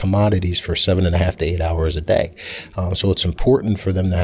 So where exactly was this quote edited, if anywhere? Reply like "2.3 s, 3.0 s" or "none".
none